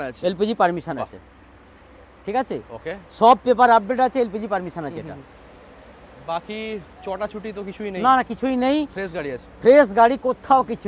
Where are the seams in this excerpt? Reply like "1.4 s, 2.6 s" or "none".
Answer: none